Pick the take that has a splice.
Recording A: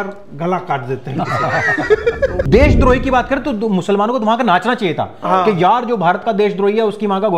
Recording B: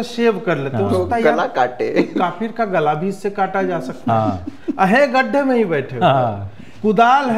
A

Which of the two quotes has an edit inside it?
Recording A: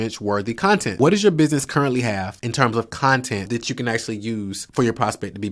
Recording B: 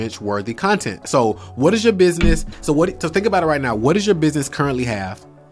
A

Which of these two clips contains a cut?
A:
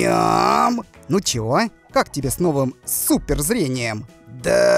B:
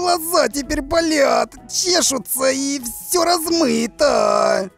A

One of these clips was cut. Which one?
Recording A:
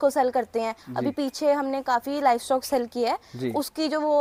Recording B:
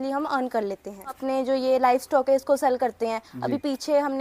B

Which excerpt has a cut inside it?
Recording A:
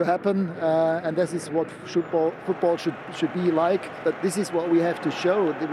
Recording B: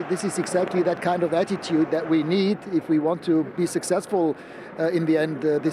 A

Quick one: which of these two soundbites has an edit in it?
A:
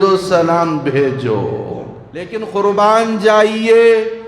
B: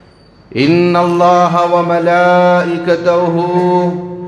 A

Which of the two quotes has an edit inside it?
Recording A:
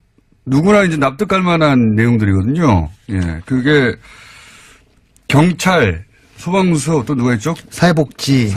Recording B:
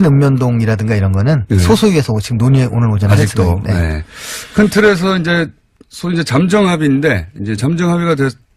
B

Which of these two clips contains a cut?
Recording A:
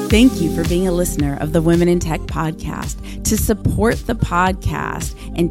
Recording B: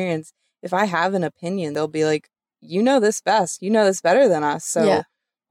B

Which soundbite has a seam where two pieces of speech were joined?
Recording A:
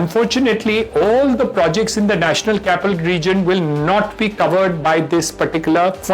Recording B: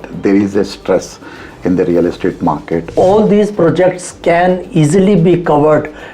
B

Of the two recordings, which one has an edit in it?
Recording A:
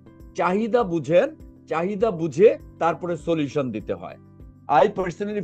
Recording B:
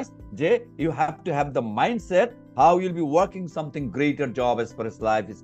A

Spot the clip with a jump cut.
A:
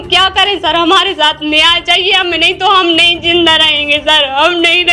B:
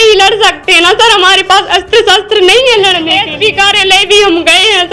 B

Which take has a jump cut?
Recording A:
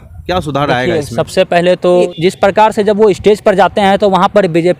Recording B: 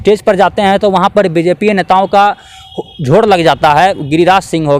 A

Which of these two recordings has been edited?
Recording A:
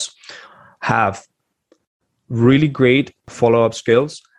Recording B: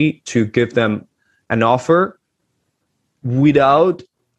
A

